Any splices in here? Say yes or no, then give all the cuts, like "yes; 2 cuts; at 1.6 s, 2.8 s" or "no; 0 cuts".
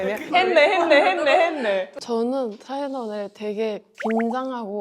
yes; 1 cut; at 1.9 s